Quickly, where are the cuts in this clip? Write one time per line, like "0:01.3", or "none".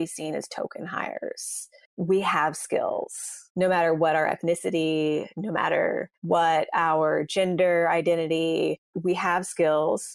none